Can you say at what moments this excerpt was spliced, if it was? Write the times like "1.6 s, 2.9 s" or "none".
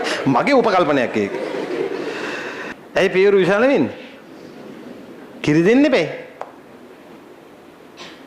2.7 s